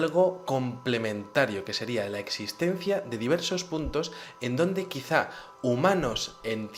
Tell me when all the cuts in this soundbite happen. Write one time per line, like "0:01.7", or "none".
none